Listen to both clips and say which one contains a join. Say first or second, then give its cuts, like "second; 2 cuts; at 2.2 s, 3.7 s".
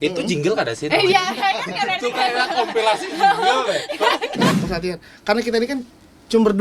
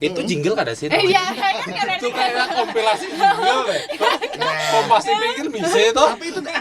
first; 1 cut; at 4.6 s